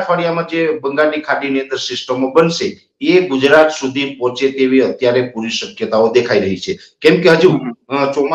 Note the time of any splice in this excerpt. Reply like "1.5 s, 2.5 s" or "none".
none